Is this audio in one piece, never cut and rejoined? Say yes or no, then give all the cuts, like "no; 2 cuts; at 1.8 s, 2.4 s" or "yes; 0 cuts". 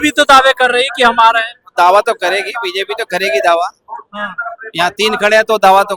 yes; 0 cuts